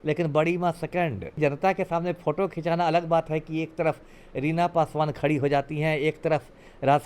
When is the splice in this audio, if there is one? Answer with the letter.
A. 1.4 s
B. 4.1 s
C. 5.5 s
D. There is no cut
A